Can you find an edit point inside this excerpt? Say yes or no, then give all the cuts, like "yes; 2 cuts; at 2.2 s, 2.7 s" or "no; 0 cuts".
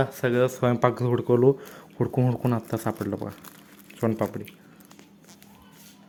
no; 0 cuts